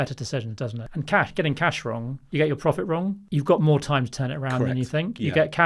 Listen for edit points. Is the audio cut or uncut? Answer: cut